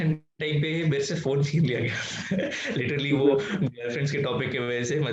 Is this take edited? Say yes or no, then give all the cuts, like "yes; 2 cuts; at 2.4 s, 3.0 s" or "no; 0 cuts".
no; 0 cuts